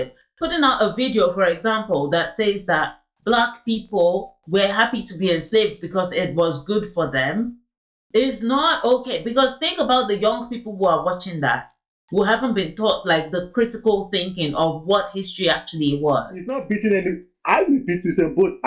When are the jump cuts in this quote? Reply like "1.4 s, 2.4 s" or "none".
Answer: 16.6 s